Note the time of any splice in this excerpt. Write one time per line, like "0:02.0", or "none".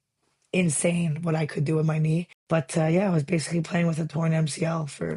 0:02.4